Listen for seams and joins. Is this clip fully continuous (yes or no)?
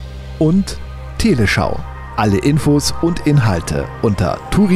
yes